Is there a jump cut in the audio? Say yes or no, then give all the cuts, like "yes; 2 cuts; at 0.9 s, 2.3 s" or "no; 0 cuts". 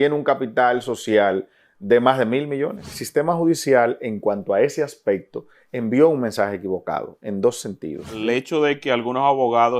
yes; 2 cuts; at 3.0 s, 8.2 s